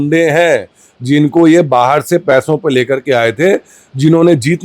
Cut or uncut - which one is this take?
uncut